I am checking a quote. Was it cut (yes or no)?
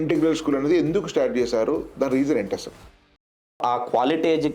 yes